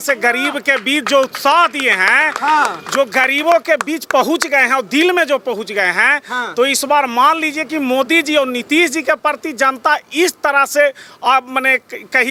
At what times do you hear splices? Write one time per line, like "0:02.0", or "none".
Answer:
none